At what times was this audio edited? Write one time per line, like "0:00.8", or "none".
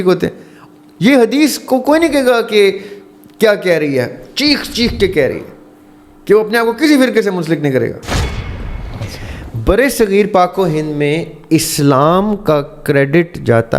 0:08.4